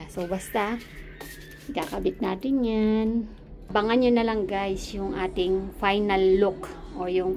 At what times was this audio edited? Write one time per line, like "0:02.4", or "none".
0:03.7